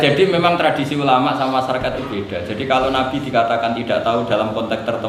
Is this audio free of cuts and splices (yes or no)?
yes